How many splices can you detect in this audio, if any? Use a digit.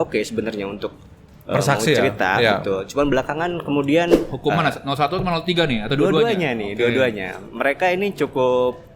1